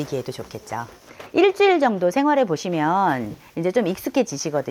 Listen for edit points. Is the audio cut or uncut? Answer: cut